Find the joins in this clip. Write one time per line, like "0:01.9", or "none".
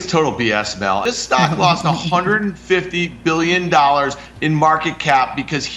0:01.0